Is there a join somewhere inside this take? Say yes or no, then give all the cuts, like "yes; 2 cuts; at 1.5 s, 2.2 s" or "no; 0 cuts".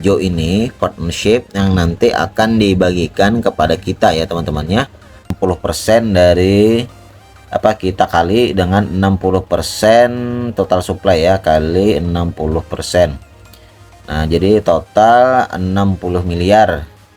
yes; 1 cut; at 5.3 s